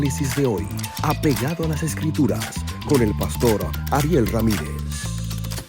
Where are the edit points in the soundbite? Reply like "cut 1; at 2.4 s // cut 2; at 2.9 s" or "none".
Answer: none